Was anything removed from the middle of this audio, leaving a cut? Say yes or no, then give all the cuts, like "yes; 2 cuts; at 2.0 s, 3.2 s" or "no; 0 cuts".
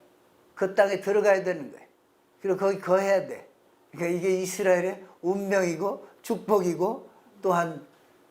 no; 0 cuts